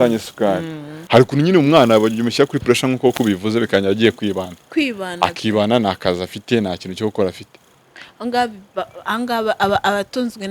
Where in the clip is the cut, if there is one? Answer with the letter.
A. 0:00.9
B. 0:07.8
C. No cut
A